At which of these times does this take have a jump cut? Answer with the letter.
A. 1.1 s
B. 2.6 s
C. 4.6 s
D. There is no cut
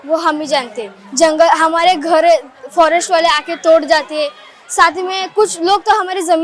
D